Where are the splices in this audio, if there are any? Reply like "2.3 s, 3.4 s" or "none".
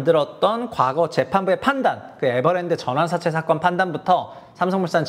none